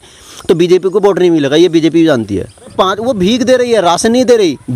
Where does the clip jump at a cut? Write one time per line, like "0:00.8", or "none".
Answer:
0:02.7